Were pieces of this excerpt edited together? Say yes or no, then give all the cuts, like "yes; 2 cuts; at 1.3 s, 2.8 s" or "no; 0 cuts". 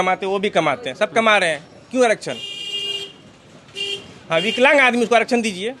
no; 0 cuts